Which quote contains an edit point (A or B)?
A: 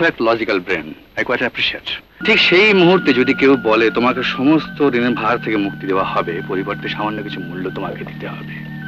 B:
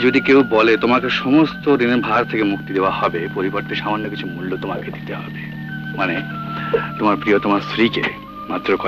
A